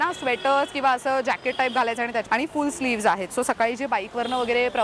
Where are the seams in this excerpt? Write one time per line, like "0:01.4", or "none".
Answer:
0:02.2